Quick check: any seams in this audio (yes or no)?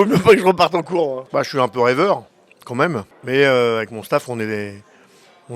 yes